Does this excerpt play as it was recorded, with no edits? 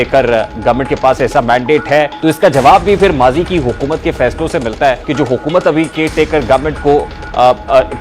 no; 2 cuts; at 2.1 s, 5.0 s

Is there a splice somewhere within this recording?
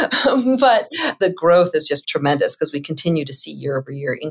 yes; 2 cuts; at 1.0 s, 2.0 s

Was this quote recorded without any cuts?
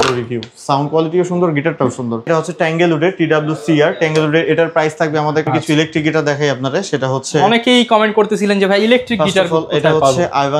no; 2 cuts; at 2.3 s, 5.4 s

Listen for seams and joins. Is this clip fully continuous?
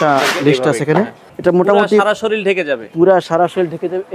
no; 1 cut; at 1.2 s

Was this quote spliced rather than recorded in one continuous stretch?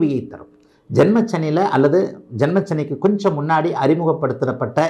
no; 0 cuts

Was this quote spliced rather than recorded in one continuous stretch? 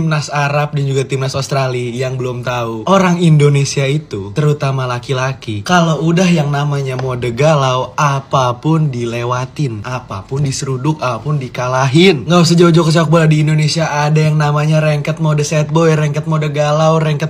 no; 0 cuts

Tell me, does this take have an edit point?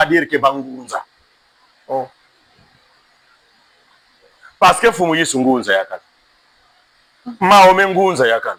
no; 0 cuts

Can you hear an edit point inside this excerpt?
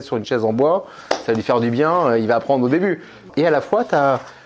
yes; 1 cut; at 3.3 s

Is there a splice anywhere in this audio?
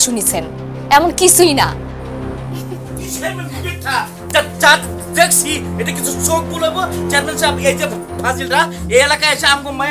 no; 0 cuts

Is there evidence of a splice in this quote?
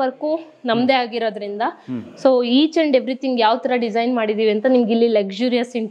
no; 0 cuts

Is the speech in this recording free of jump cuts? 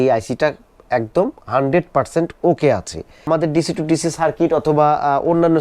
no; 1 cut; at 3.3 s

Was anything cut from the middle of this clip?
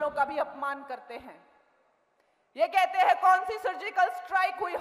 no; 0 cuts

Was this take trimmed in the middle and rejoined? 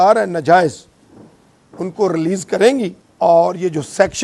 yes; 1 cut; at 3.0 s

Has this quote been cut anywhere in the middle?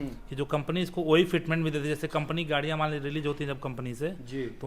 no; 0 cuts

